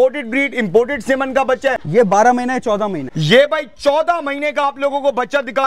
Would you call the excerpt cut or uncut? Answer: cut